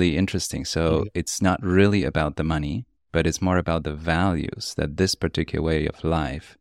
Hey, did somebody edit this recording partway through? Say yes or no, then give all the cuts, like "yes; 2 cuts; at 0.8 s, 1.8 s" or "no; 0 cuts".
no; 0 cuts